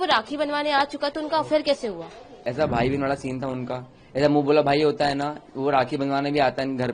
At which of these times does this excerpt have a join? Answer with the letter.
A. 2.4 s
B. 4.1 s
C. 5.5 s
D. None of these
A